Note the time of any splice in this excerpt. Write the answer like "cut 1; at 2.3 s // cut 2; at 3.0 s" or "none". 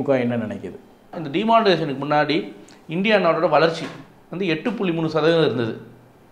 cut 1; at 1.2 s